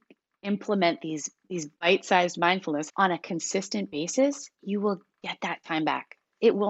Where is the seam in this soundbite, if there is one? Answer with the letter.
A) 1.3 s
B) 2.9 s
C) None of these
B